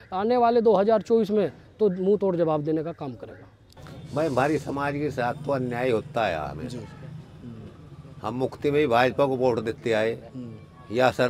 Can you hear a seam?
no; 0 cuts

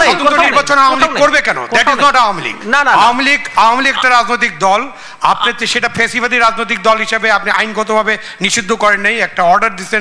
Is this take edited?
no; 0 cuts

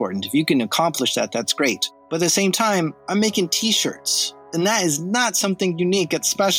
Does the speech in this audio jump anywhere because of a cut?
yes; 2 cuts; at 1.9 s, 4.4 s

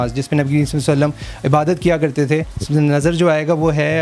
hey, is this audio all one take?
no; 1 cut; at 2.6 s

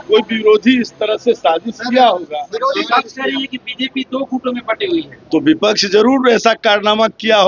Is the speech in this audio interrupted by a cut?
no; 0 cuts

